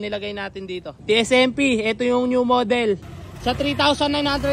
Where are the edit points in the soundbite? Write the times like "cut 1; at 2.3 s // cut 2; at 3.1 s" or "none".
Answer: cut 1; at 0.9 s // cut 2; at 3.1 s